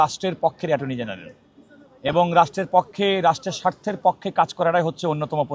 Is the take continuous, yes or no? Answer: yes